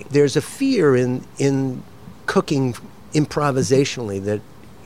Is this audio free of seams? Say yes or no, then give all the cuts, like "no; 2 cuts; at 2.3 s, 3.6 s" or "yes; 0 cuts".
yes; 0 cuts